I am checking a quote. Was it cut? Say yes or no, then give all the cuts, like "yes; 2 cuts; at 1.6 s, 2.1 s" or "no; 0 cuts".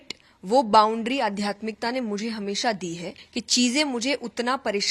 yes; 1 cut; at 3.2 s